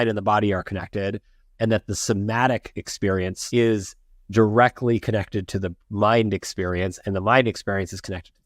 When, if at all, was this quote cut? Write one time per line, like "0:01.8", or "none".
0:03.4